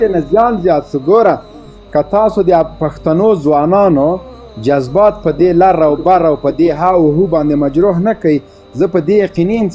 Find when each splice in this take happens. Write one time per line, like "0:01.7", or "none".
none